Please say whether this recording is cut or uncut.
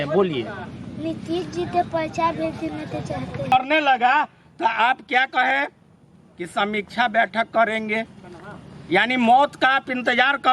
cut